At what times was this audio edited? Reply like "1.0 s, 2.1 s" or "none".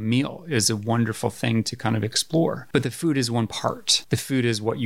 2.6 s, 3.9 s